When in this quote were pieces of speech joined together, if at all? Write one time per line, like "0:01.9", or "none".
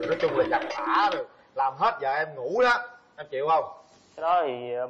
none